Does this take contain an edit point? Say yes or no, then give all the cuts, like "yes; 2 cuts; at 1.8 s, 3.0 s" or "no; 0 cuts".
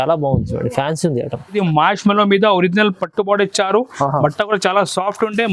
yes; 1 cut; at 1.6 s